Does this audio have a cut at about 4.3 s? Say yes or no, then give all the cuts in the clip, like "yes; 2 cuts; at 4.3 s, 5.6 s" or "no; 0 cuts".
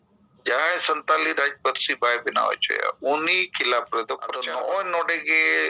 yes; 1 cut; at 4.3 s